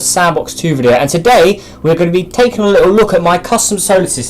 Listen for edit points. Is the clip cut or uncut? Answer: cut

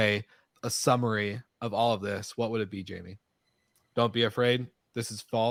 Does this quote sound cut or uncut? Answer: uncut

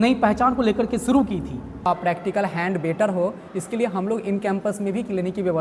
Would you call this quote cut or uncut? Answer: cut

